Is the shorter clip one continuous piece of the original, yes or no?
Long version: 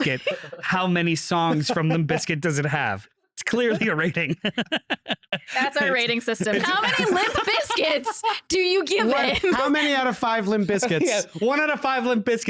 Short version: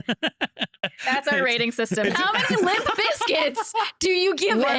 yes